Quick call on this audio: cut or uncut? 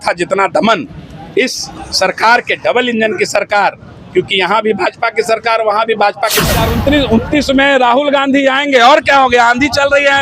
cut